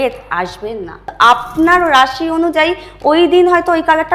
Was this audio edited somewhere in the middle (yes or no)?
yes